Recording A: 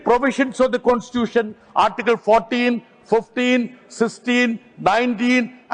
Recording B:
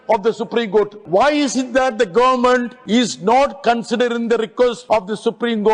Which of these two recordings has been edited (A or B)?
B